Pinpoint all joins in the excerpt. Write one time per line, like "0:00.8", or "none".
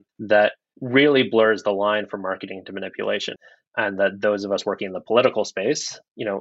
0:03.3